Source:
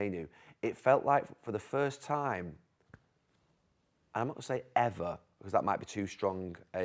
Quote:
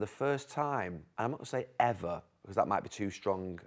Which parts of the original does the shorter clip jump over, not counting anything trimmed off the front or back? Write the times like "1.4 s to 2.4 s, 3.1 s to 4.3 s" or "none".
2.5 s to 4.0 s